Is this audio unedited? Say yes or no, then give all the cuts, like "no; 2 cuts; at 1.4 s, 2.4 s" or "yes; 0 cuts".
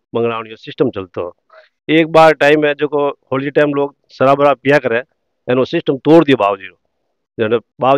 yes; 0 cuts